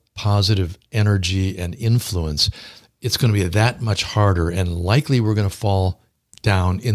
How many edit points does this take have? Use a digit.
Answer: 0